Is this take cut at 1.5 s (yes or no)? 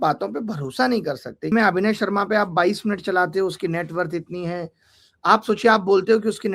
yes